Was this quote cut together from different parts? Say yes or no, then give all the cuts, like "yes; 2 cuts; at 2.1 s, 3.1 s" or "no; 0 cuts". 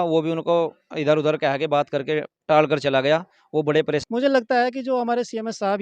yes; 1 cut; at 4.0 s